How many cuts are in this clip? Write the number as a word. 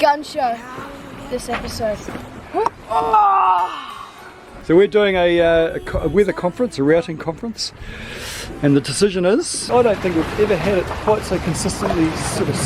two